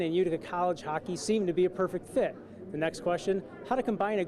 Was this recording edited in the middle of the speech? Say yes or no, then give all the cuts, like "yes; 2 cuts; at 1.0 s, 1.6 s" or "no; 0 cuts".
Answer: no; 0 cuts